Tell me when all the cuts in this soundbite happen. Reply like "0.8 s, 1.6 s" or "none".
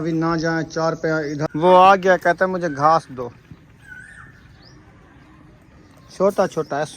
1.5 s